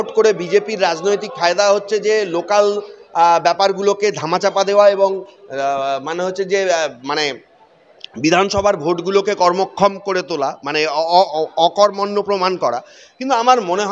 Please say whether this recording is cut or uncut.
uncut